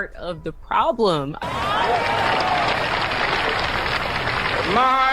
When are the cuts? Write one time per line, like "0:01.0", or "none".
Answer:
0:01.4